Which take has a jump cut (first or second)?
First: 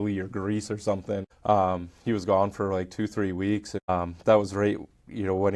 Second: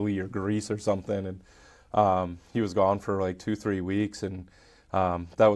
first